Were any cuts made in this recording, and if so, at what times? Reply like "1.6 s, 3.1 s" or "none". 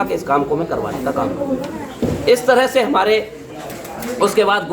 1.8 s